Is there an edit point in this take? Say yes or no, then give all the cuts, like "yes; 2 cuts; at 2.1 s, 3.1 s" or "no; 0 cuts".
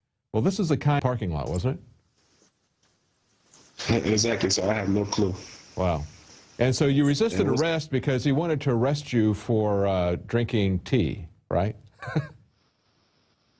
no; 0 cuts